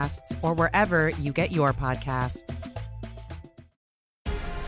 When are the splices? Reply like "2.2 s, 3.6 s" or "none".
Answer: 3.8 s